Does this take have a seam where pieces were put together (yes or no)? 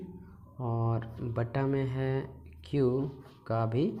no